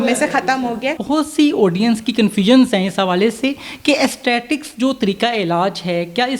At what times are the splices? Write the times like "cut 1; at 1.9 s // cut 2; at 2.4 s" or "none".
cut 1; at 1.0 s